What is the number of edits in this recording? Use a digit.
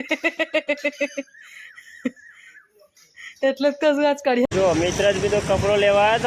1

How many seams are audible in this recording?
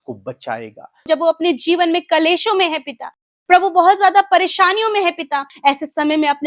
2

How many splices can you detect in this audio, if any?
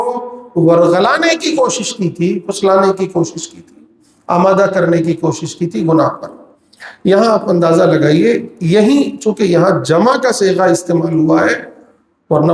0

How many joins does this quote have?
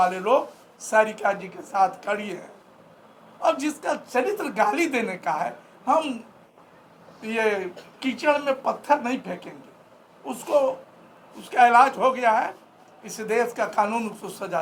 0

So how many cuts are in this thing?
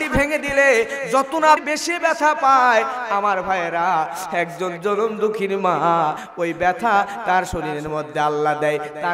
2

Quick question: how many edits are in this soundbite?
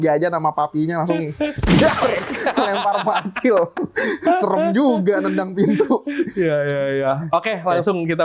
0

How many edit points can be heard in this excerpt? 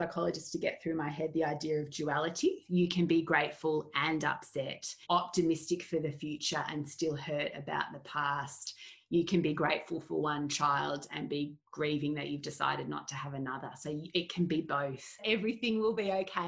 4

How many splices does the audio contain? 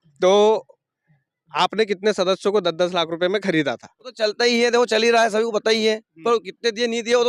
1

